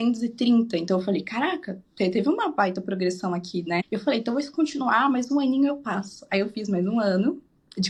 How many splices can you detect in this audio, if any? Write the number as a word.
zero